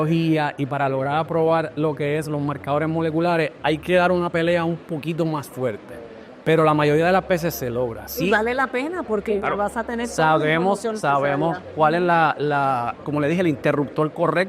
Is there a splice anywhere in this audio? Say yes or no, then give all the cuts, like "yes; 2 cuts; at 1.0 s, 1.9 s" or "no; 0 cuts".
no; 0 cuts